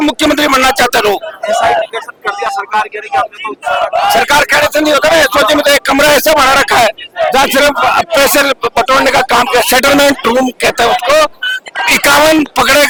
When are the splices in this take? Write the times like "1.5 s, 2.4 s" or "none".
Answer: none